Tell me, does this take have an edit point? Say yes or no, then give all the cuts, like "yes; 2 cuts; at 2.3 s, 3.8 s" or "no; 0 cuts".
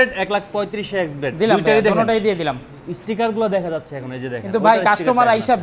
no; 0 cuts